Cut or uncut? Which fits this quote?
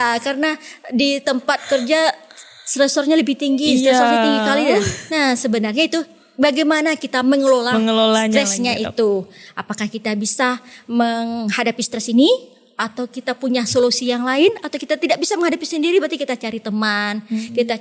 uncut